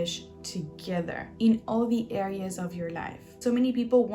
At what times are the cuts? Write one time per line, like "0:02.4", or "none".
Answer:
0:01.3
0:03.2

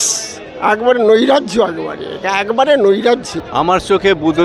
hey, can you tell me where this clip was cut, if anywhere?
0:03.4

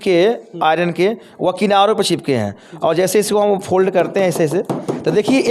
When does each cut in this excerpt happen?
none

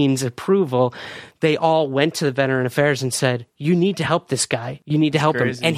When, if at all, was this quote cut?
0:03.5
0:04.7

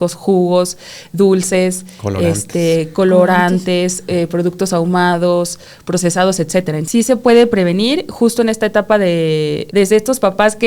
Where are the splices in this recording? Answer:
0:06.8
0:09.6

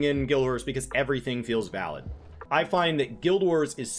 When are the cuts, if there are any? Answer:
0:02.4

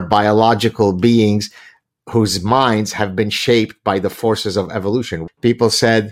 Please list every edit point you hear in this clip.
0:05.2

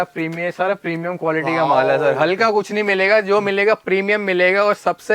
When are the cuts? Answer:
none

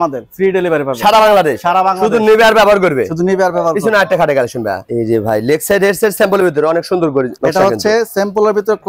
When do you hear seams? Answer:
none

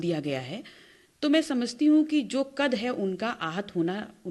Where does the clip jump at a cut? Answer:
none

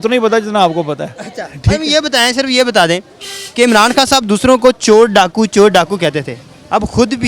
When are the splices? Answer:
none

